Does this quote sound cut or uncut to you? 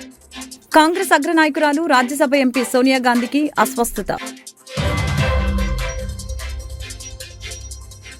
uncut